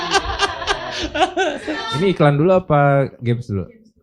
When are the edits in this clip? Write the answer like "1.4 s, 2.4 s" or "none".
1.9 s